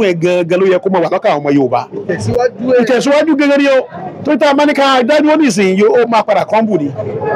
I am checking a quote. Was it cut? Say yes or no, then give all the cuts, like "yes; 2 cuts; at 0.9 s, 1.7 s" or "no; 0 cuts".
no; 0 cuts